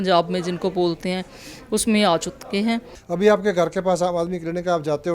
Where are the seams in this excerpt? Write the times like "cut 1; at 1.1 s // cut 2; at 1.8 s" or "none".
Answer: cut 1; at 2.9 s